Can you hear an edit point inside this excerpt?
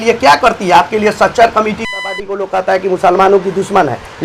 yes; 1 cut; at 2.4 s

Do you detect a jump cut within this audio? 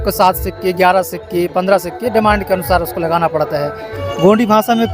yes; 1 cut; at 4.0 s

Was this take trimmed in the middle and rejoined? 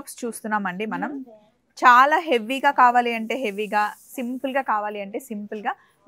no; 0 cuts

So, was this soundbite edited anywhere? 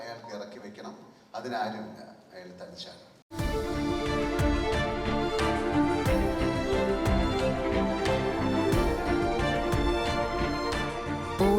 yes; 1 cut; at 3.2 s

